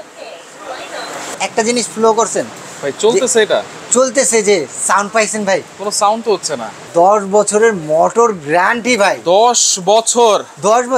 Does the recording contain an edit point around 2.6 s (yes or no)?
no